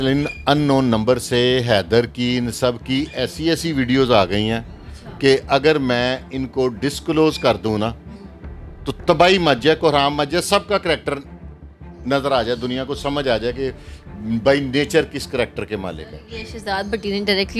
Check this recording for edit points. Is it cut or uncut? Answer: uncut